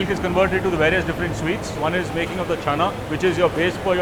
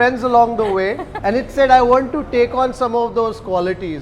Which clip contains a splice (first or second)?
second